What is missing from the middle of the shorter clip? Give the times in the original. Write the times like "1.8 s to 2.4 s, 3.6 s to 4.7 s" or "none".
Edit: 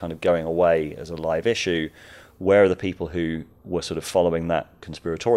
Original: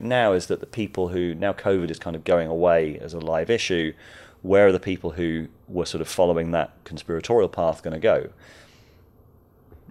none